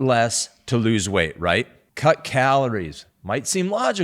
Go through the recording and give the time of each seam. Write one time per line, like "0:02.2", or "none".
0:01.8